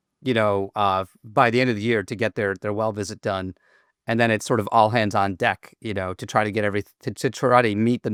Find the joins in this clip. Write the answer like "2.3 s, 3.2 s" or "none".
none